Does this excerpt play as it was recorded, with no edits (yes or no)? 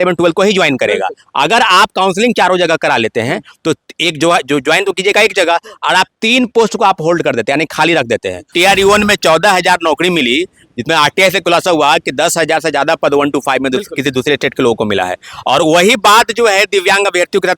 no